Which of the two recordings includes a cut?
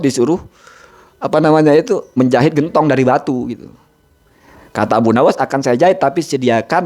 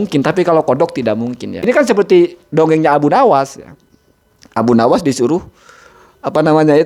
second; 1 cut; at 1.6 s

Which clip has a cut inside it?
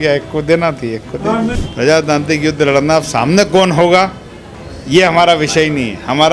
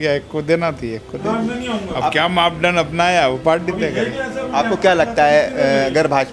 first; 1 cut; at 1.6 s

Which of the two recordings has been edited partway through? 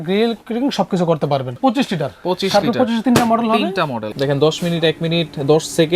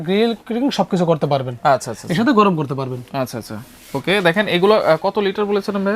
first; 2 cuts; at 1.6 s, 4.0 s

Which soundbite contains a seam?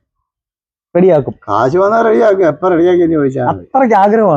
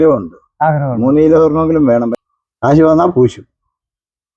second; 1 cut; at 2.2 s

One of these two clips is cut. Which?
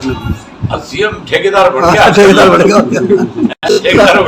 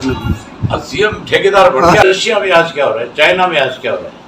second; 1 cut; at 2.0 s

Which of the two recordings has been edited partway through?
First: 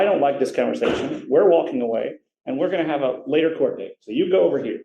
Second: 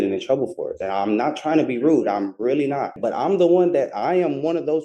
second; 1 cut; at 2.9 s

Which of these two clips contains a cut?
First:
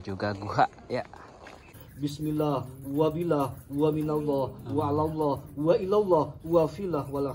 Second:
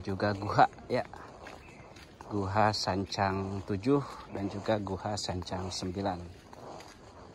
first; 1 cut; at 1.8 s

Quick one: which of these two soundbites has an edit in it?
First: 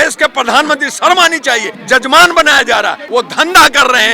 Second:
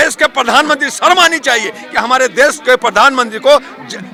first; 2 cuts; at 1.7 s, 3.0 s

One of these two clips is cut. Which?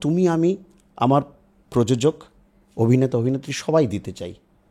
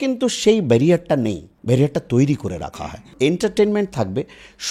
second; 2 cuts; at 1.5 s, 2.6 s

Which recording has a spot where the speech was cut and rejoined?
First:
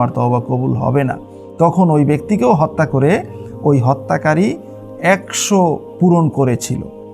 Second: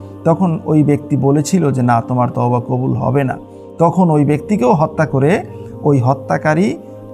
first; 1 cut; at 5.9 s

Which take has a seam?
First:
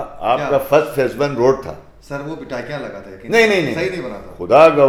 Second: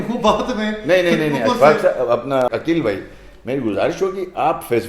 second; 1 cut; at 2.5 s

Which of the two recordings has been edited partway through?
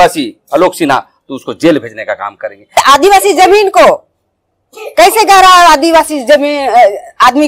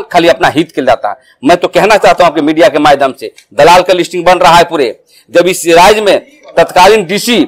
first; 1 cut; at 2.8 s

